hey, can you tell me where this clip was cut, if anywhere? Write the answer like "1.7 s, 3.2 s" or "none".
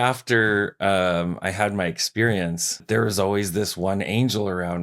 2.7 s